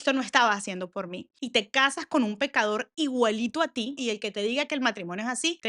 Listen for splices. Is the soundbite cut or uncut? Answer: cut